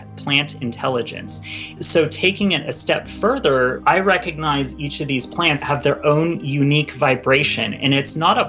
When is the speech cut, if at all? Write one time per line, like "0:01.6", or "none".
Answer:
0:01.8
0:03.8
0:05.6